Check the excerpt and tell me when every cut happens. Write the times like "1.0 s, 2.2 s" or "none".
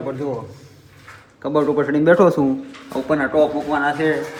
none